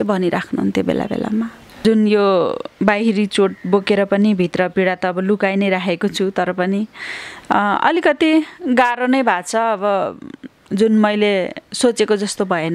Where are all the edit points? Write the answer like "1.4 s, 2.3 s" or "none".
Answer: 1.8 s